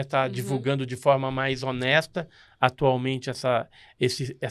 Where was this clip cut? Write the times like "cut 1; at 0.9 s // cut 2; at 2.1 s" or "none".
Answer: none